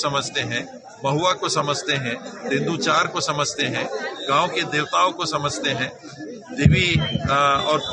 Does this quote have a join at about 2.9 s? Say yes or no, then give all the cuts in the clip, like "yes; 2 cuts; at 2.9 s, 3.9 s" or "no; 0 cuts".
no; 0 cuts